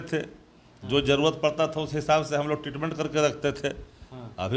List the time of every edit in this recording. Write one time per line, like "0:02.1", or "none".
none